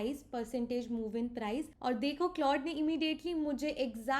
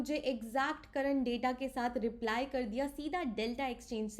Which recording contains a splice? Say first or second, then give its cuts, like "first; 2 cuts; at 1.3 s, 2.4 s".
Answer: first; 1 cut; at 1.7 s